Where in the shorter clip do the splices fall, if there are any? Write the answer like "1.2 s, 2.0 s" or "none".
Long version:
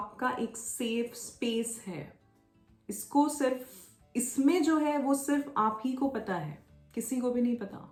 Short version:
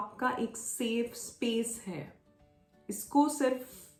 none